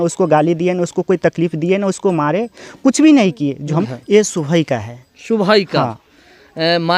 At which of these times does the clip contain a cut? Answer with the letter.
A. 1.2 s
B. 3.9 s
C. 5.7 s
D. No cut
B